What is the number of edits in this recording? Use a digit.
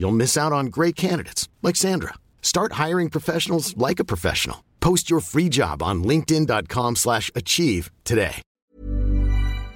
1